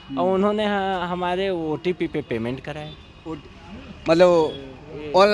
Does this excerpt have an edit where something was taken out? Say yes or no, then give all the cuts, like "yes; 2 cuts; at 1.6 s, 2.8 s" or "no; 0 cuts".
no; 0 cuts